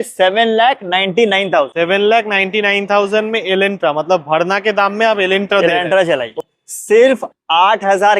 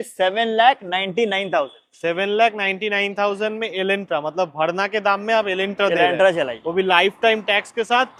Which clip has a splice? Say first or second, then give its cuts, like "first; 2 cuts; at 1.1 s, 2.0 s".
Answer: first; 2 cuts; at 1.7 s, 6.3 s